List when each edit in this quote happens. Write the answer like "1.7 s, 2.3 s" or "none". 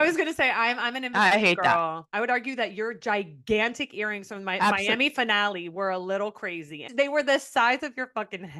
2.1 s, 6.8 s